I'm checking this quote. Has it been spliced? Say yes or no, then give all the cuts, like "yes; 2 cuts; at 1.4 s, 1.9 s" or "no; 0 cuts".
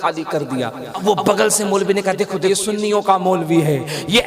yes; 2 cuts; at 1.0 s, 2.5 s